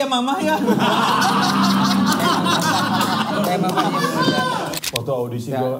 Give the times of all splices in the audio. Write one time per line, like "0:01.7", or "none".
0:04.7